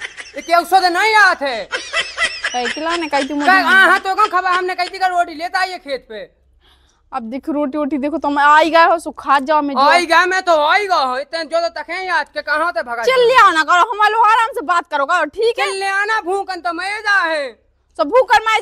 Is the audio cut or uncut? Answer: uncut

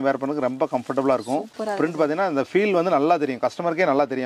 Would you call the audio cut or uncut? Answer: cut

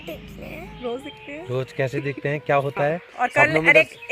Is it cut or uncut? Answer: cut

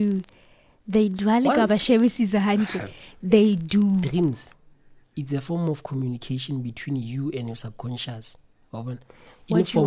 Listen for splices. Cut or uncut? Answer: cut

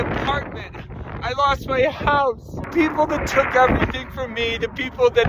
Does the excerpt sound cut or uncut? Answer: cut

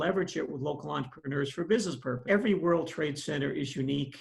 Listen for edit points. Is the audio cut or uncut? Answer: cut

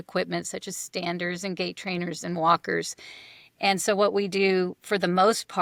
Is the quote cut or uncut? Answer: uncut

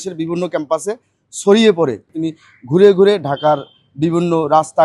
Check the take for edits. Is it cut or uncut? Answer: cut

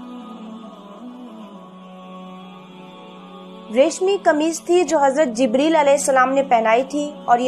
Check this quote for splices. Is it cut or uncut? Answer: cut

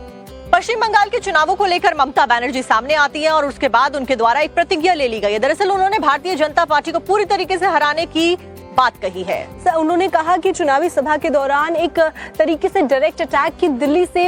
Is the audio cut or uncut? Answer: uncut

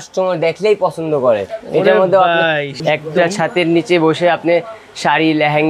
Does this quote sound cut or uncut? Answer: cut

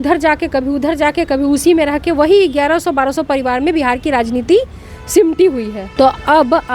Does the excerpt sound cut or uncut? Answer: cut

